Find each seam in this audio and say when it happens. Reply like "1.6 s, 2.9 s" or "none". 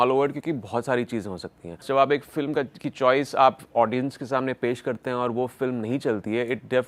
1.8 s